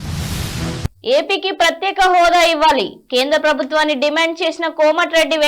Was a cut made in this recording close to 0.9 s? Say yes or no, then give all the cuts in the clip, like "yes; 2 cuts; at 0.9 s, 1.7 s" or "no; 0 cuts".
yes; 1 cut; at 0.9 s